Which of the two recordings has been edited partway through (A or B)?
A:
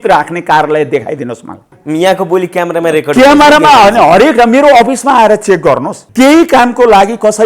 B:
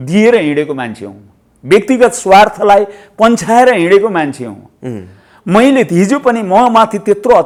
A